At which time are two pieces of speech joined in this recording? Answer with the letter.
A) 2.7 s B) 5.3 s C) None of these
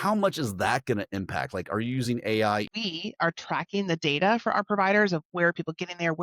A